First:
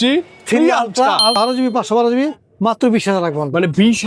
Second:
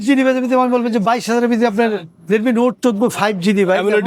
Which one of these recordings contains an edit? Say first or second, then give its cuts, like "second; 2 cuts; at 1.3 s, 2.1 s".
first; 1 cut; at 1.3 s